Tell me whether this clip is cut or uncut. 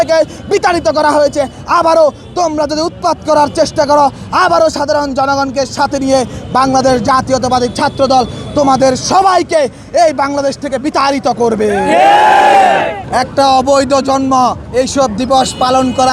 cut